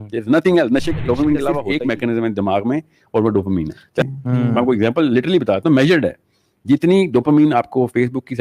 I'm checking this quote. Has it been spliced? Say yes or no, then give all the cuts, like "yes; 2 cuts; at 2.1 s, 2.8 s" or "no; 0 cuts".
yes; 2 cuts; at 1.6 s, 4.0 s